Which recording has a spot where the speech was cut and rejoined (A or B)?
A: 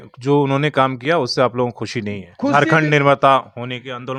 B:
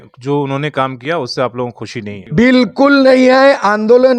B